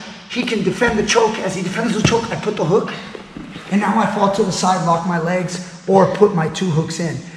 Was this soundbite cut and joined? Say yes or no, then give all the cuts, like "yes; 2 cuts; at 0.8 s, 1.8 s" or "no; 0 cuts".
no; 0 cuts